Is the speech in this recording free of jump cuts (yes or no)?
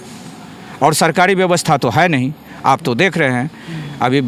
yes